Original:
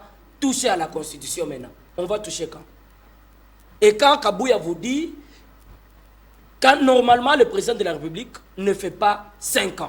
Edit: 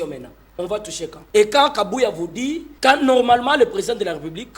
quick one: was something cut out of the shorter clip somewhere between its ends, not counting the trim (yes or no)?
yes